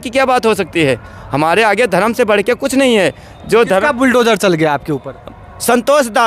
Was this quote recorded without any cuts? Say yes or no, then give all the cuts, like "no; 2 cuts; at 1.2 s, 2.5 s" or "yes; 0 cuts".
yes; 0 cuts